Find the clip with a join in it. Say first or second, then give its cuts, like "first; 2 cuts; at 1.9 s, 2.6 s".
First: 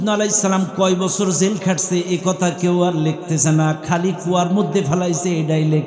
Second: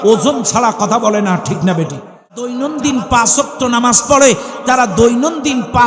second; 1 cut; at 2.5 s